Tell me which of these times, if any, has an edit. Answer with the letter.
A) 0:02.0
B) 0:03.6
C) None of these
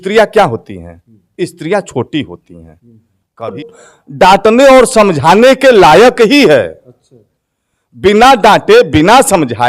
B